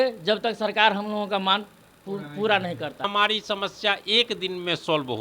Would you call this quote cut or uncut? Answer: cut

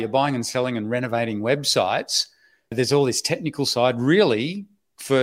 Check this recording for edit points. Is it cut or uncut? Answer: cut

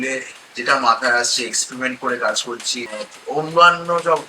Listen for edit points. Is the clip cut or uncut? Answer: cut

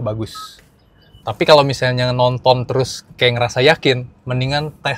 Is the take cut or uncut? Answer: cut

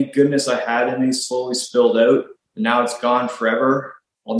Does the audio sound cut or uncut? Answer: cut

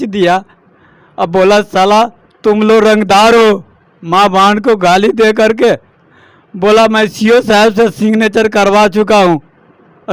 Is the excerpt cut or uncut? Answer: uncut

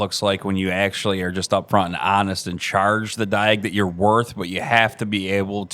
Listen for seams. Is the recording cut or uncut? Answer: uncut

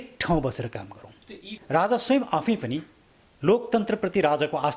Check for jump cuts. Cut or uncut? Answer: cut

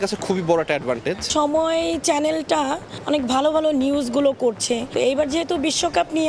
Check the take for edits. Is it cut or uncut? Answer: cut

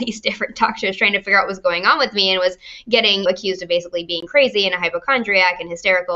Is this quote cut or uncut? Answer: uncut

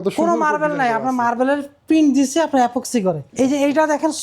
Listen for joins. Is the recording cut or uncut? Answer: cut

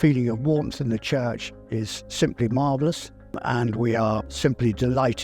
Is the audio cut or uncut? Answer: cut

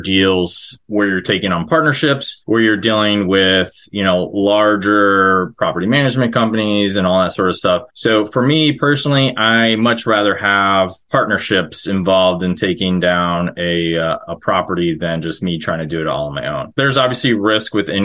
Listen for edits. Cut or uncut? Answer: cut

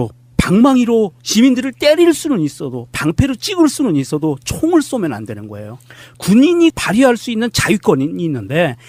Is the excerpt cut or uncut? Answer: uncut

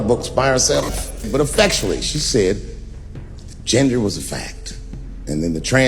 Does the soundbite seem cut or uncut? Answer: cut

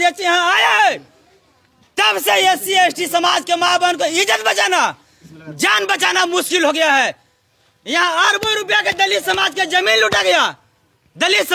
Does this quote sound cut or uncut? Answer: uncut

